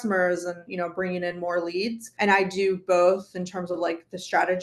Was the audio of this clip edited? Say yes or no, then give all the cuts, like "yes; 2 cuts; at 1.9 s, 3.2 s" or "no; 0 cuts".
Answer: yes; 1 cut; at 2.1 s